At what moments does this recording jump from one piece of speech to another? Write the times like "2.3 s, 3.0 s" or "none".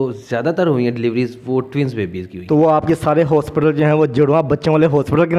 2.3 s

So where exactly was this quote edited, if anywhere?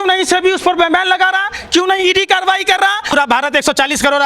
3.1 s

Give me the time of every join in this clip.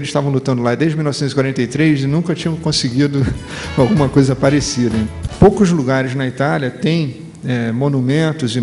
5.1 s

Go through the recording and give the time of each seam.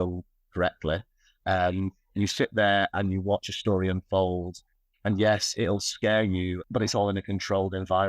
6.6 s

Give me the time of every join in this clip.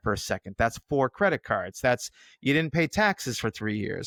none

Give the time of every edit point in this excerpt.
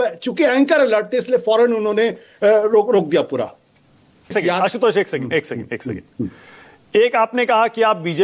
4.3 s

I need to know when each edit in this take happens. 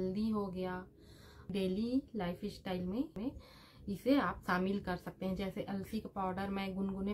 1.5 s, 3.1 s

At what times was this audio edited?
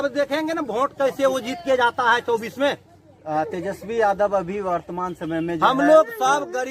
none

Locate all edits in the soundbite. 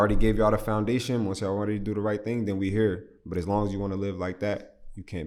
none

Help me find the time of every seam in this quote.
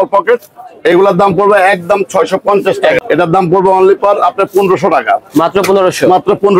3.0 s

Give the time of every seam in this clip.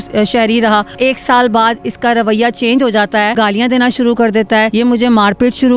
0.9 s, 3.3 s, 4.7 s

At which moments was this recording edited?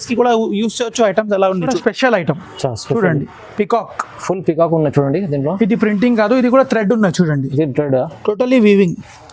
1.7 s

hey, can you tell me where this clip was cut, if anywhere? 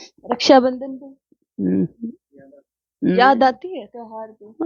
none

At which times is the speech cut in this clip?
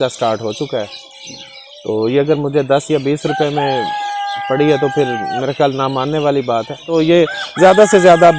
6.9 s

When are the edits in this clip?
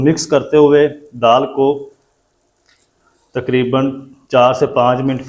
none

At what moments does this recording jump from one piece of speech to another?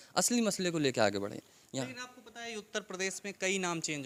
none

